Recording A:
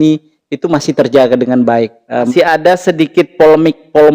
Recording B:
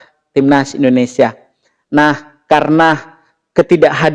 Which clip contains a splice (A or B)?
A